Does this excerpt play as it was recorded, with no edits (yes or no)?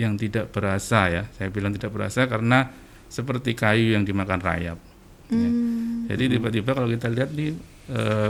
yes